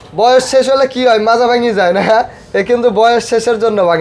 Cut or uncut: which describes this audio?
uncut